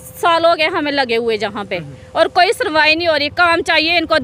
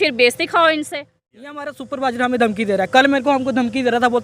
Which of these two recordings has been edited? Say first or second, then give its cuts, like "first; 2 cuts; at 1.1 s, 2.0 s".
second; 1 cut; at 1.6 s